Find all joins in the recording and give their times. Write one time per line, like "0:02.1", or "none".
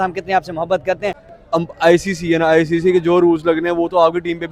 0:01.3

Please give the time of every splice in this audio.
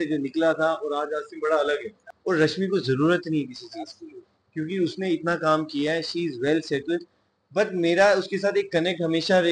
0:02.1

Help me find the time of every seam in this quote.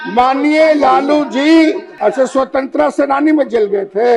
0:01.9

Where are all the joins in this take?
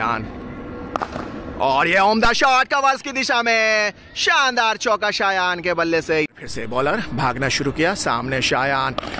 0:06.3

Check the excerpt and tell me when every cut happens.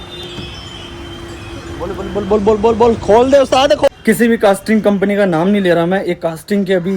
0:03.9

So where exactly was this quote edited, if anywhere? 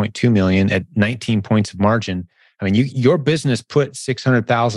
0:02.9

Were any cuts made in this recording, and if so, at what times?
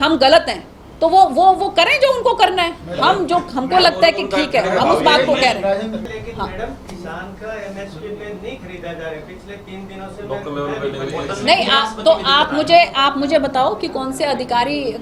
none

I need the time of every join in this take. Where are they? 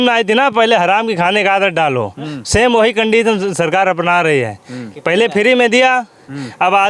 none

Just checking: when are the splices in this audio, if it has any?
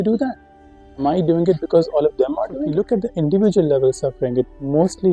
0:02.6

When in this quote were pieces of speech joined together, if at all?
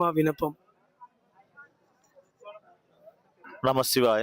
none

